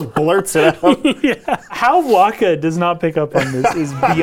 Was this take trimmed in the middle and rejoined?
yes; 1 cut; at 1.8 s

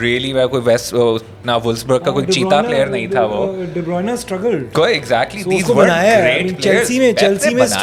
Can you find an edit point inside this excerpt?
no; 0 cuts

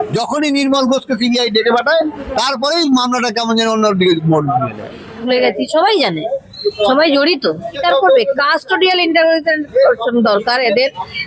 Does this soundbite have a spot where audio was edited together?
yes; 2 cuts; at 5.2 s, 7.7 s

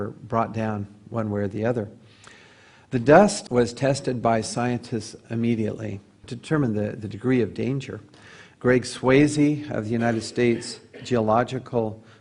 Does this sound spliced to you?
yes; 1 cut; at 2.6 s

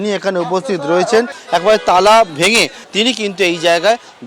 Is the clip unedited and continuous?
no; 2 cuts; at 1.4 s, 2.8 s

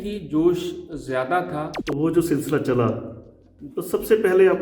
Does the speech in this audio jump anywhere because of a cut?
yes; 1 cut; at 1.8 s

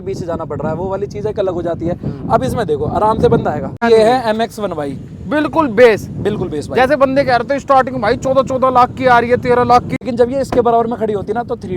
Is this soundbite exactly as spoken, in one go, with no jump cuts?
no; 2 cuts; at 3.8 s, 9.9 s

